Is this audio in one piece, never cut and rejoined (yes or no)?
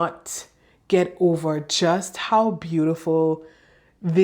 yes